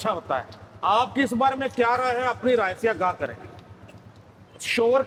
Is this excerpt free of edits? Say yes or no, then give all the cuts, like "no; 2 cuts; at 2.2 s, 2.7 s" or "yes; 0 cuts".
yes; 0 cuts